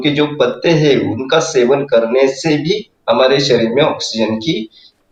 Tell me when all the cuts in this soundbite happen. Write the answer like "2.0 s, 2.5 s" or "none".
none